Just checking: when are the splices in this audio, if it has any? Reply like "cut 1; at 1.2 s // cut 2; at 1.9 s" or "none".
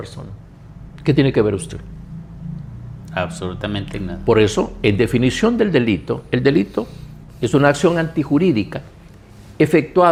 none